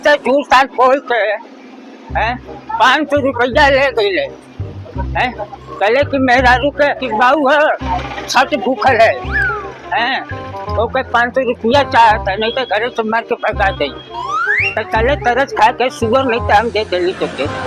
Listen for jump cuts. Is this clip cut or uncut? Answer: uncut